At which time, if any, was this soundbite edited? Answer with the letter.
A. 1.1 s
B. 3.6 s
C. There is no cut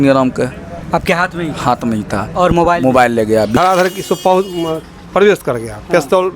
B